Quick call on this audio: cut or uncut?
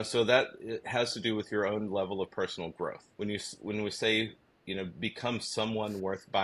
cut